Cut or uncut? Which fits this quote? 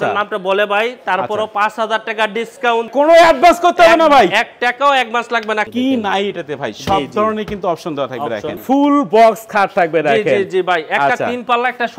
cut